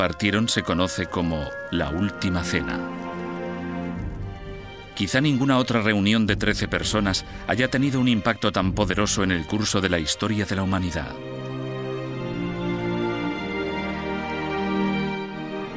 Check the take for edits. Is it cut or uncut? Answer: uncut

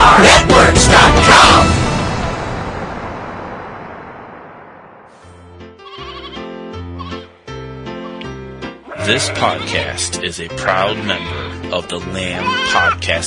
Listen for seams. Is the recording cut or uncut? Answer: cut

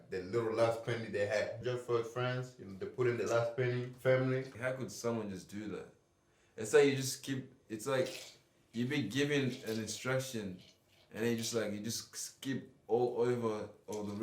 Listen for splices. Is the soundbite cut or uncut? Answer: cut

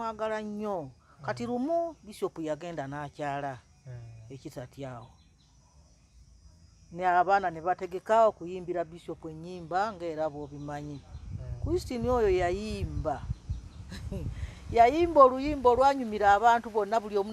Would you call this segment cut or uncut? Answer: uncut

